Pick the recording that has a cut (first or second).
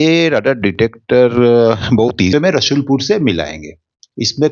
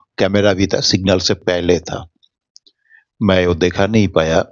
first